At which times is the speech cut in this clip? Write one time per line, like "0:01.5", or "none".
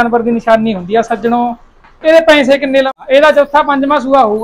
0:02.9